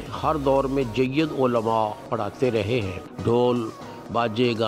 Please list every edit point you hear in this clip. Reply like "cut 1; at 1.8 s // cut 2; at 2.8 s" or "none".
cut 1; at 3.0 s